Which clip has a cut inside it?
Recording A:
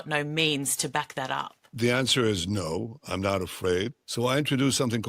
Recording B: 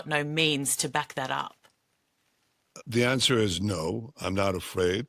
A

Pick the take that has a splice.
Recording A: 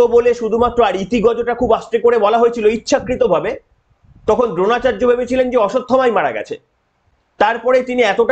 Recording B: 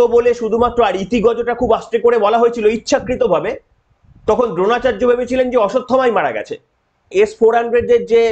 B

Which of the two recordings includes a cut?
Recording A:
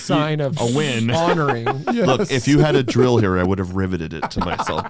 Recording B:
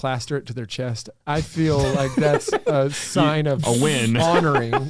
B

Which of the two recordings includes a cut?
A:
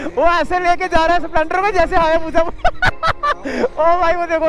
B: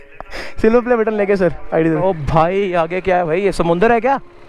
B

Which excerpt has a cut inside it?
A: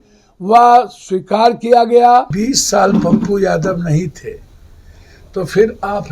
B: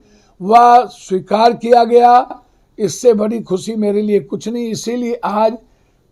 A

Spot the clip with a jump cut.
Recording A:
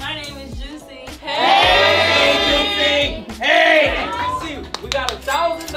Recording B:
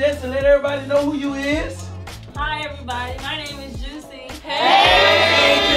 A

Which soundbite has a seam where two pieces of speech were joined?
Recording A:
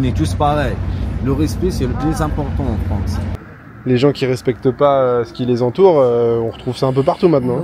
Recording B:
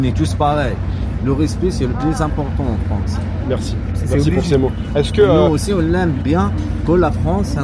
A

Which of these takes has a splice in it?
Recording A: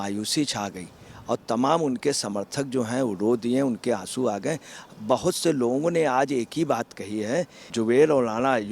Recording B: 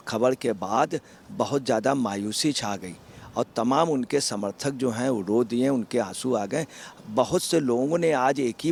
A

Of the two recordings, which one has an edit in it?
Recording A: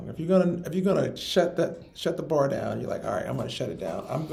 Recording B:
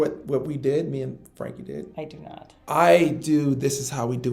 B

